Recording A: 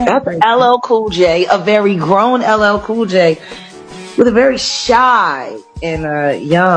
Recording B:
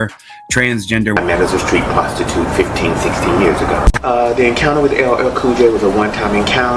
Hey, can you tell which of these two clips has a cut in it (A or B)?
B